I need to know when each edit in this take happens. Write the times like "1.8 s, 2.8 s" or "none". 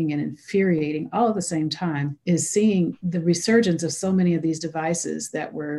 2.1 s, 3.0 s